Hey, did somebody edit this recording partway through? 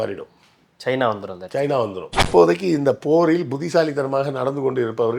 yes; 1 cut; at 2.2 s

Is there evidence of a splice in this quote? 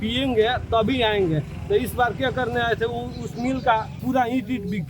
yes; 1 cut; at 3.9 s

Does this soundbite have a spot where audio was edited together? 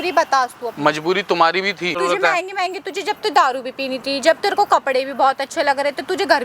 yes; 1 cut; at 1.9 s

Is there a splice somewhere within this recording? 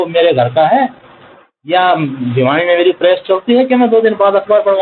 no; 0 cuts

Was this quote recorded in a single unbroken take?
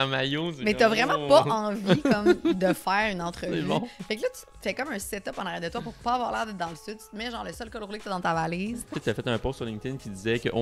no; 1 cut; at 8.9 s

